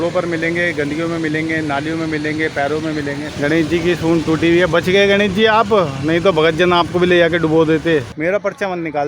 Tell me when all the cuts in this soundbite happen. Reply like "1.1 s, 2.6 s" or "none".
3.3 s, 8.1 s